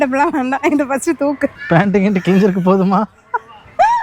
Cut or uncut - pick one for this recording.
cut